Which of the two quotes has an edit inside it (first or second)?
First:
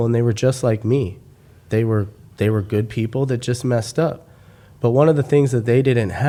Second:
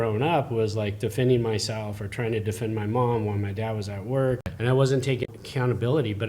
second